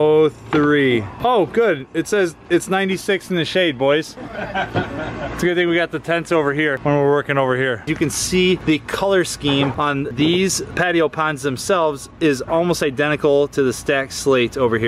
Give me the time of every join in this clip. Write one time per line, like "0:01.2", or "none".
0:07.9